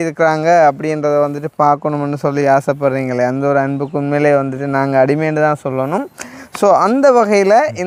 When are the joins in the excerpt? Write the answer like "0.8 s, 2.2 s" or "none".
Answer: none